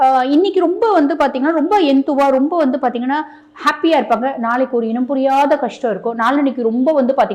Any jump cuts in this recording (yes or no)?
no